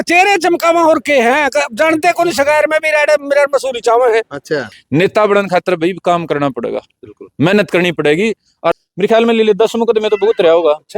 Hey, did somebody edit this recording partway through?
yes; 2 cuts; at 4.7 s, 8.7 s

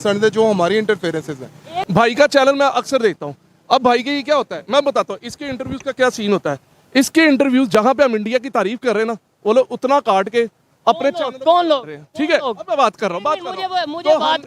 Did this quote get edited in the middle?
yes; 1 cut; at 1.7 s

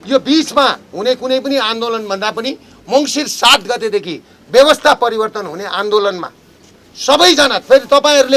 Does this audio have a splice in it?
no; 0 cuts

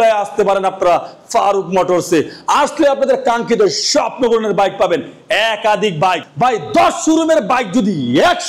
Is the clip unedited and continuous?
yes; 0 cuts

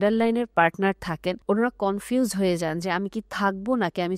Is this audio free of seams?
no; 1 cut; at 1.4 s

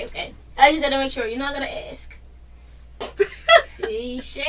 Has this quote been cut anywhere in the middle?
no; 0 cuts

